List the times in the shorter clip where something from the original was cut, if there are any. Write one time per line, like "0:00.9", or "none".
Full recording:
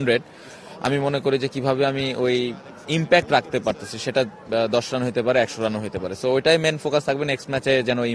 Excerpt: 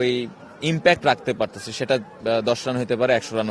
none